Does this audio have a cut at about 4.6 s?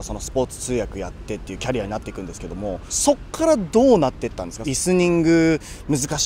yes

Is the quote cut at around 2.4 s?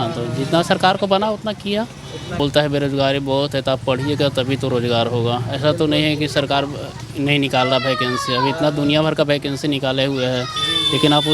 yes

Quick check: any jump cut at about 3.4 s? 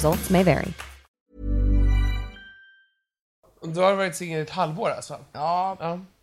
yes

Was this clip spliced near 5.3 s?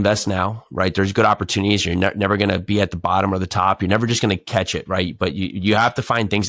no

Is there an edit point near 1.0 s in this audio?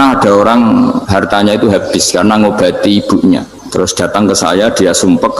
yes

